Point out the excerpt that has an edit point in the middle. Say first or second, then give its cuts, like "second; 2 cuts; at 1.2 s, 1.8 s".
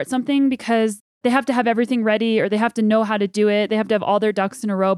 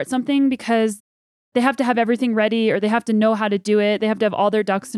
first; 1 cut; at 1.1 s